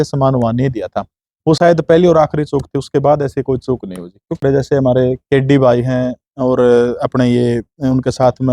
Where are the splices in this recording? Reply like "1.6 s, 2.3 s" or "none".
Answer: 4.4 s